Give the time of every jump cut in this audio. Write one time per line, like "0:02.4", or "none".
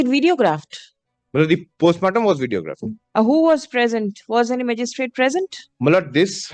none